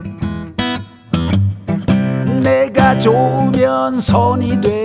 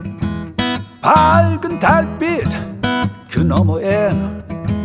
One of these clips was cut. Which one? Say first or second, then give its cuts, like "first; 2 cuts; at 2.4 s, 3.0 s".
second; 1 cut; at 0.9 s